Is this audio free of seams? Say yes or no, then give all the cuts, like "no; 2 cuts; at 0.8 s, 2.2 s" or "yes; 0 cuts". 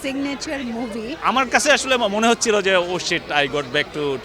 no; 1 cut; at 1.1 s